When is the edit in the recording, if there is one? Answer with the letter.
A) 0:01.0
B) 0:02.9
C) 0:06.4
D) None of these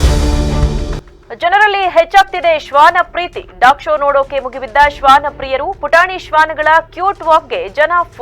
A